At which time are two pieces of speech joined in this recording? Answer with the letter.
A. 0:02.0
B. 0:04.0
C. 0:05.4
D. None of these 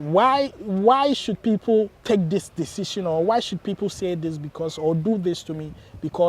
A